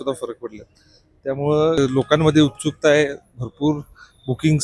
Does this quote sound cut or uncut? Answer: cut